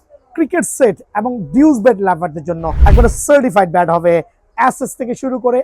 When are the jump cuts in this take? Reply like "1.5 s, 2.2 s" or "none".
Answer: 2.7 s